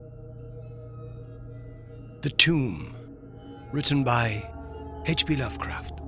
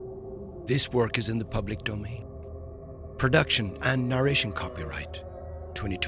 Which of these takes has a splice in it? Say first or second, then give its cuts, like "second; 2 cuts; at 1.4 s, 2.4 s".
first; 1 cut; at 2.1 s